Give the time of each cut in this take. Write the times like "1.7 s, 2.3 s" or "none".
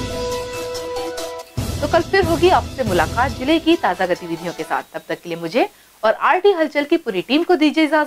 none